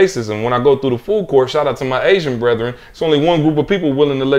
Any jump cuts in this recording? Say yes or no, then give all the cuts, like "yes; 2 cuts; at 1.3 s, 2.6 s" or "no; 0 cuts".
no; 0 cuts